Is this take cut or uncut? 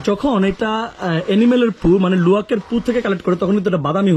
uncut